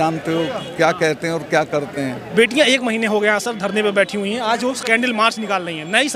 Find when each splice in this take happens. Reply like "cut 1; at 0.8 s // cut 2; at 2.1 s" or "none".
none